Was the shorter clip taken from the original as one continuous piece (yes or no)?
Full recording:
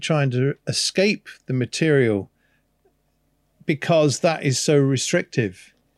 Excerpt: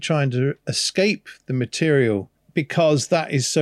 no